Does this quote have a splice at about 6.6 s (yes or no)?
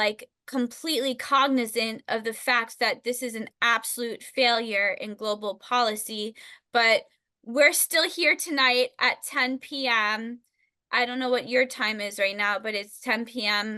no